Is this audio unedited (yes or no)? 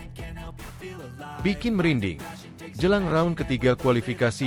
yes